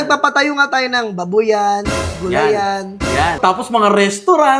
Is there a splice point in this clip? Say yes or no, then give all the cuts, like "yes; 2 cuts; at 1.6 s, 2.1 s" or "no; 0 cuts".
yes; 1 cut; at 3.4 s